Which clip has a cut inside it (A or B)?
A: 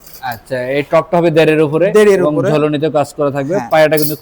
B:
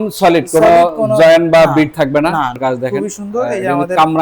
B